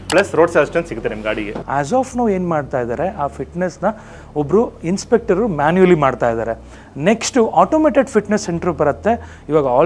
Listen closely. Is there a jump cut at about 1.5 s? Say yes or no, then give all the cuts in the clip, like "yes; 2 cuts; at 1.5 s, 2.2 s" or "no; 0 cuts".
yes; 1 cut; at 1.5 s